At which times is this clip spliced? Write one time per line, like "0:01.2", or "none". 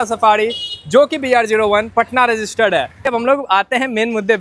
0:03.1